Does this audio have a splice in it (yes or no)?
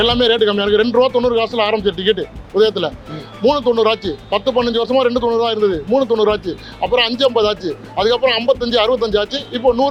no